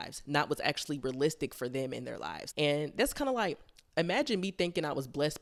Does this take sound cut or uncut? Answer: uncut